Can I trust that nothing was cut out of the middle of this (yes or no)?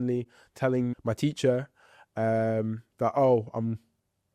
no